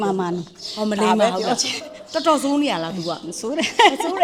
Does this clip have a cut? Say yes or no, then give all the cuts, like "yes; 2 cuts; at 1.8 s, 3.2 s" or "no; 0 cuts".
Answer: no; 0 cuts